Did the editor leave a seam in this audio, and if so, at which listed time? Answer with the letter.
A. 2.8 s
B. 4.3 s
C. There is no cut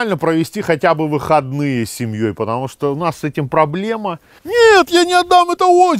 B